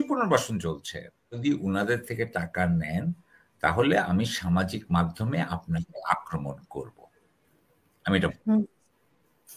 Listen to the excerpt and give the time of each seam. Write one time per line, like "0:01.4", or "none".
0:01.3